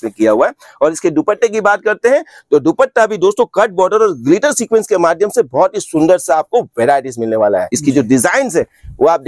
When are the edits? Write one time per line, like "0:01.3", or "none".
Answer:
0:07.7